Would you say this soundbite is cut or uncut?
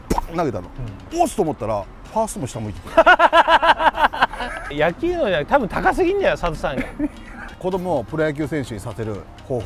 cut